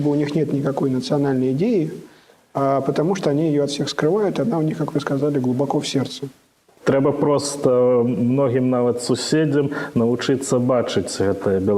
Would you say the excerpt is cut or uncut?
cut